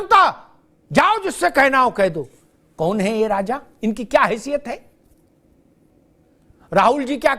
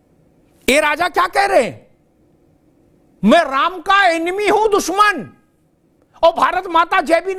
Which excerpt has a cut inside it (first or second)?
first